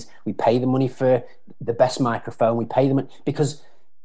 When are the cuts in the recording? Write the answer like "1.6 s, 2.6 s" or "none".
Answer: none